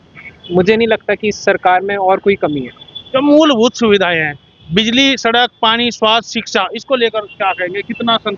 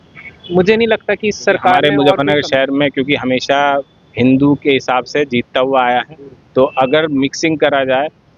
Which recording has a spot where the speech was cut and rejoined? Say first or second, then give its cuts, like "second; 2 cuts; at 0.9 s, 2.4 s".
second; 1 cut; at 1.8 s